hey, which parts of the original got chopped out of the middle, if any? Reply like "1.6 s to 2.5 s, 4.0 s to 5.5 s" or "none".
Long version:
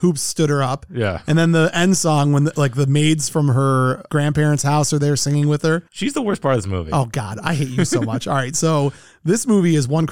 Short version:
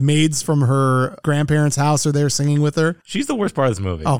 none